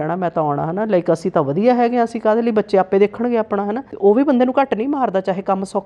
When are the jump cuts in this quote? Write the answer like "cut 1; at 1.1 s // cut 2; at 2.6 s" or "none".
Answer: cut 1; at 3.9 s